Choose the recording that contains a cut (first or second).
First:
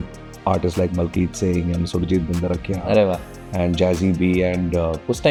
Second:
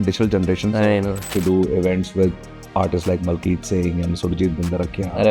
second